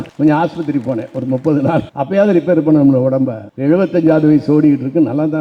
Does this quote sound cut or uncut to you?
uncut